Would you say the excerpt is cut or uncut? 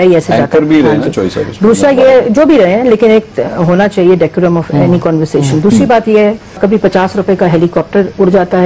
uncut